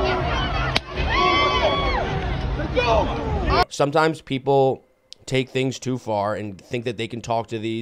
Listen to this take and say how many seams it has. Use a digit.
1